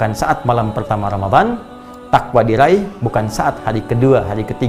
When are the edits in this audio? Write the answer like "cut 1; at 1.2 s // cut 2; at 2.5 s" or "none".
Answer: none